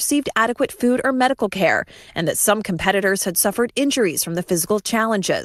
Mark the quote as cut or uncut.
uncut